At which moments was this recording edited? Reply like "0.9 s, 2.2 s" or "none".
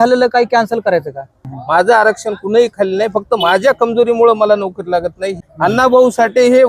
1.5 s, 5.4 s